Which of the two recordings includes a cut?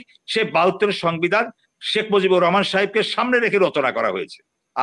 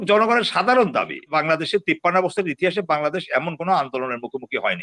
second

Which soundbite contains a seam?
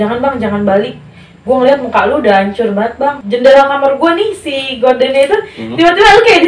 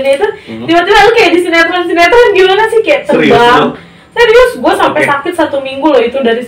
first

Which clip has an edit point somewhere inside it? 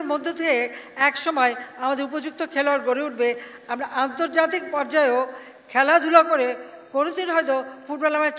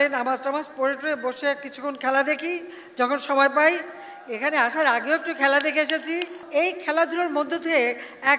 second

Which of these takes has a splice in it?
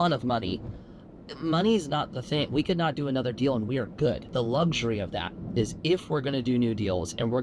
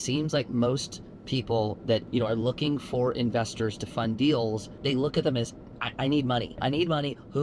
second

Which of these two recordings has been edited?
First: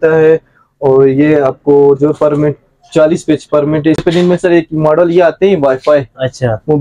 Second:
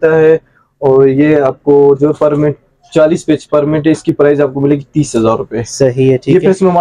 first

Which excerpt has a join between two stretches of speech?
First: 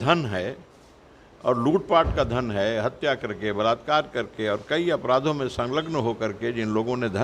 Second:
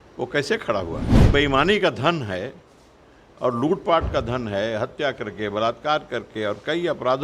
second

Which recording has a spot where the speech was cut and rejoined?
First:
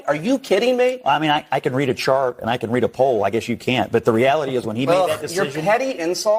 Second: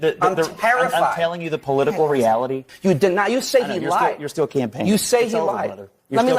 second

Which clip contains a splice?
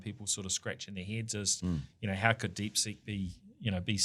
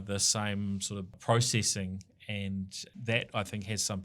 second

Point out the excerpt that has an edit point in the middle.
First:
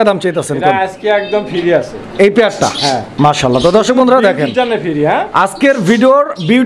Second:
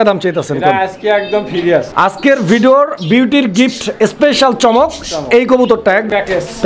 second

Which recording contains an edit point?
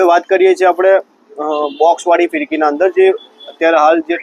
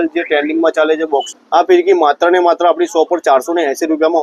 second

